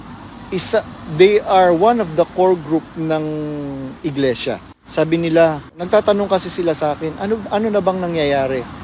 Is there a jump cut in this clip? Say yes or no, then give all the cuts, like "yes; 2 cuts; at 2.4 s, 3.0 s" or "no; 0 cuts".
yes; 2 cuts; at 4.8 s, 5.7 s